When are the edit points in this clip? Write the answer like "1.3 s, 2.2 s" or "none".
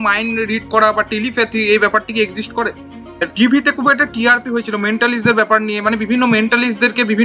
3.3 s